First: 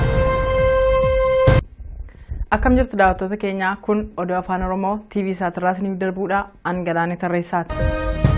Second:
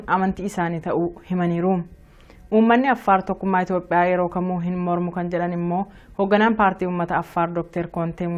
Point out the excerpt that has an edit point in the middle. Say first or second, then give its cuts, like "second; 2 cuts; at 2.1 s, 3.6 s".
first; 1 cut; at 1.7 s